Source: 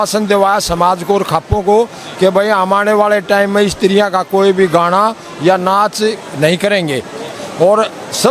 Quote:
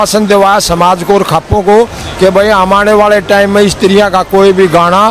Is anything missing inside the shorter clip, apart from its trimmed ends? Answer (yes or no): no